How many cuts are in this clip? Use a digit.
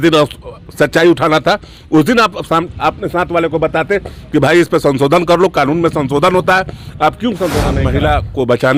1